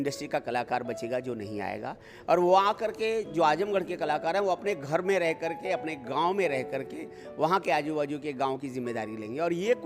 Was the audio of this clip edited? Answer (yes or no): no